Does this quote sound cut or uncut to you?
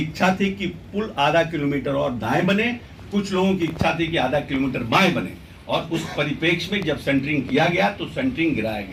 uncut